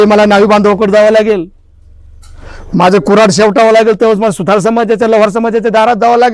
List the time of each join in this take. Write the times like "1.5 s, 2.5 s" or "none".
none